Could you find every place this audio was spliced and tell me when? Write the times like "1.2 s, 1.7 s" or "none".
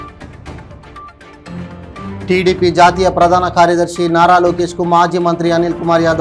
1.3 s